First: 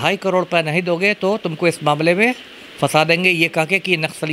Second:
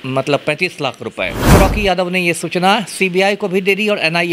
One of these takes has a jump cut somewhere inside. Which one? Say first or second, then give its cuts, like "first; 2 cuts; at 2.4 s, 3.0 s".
second; 1 cut; at 1.5 s